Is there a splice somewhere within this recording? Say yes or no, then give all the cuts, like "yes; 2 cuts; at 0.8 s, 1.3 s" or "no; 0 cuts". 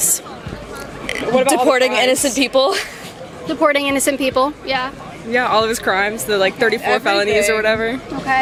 no; 0 cuts